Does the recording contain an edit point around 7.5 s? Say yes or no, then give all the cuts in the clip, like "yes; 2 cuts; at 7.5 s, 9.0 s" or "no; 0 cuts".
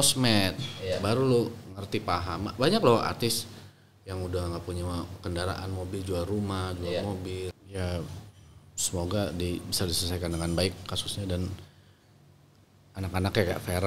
yes; 1 cut; at 7.5 s